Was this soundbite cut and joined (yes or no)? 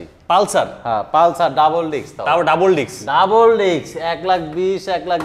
no